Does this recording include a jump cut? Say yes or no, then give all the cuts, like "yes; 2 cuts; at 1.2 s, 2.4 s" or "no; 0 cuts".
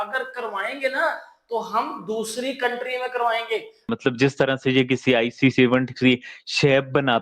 yes; 1 cut; at 3.9 s